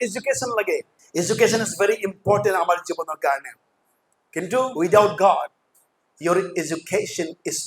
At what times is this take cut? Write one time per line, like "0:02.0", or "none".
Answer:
0:01.0
0:04.7